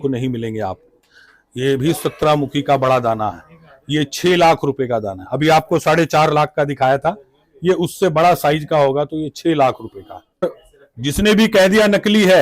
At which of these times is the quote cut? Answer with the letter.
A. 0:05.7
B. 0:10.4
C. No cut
B